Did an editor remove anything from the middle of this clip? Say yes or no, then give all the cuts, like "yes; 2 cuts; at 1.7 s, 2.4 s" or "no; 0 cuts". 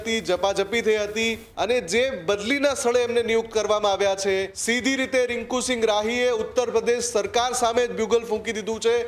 yes; 2 cuts; at 1.4 s, 4.6 s